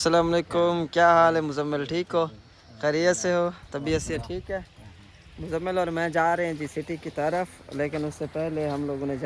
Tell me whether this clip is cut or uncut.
uncut